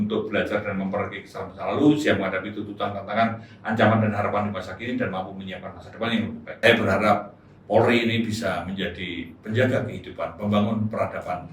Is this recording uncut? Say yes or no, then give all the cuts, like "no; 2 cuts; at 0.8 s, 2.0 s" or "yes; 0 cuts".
no; 1 cut; at 6.5 s